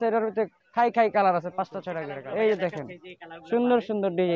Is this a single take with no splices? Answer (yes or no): no